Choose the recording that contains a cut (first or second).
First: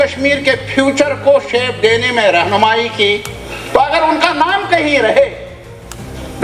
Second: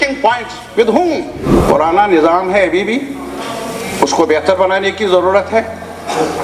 second